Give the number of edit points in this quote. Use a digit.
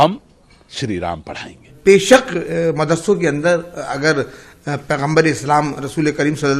1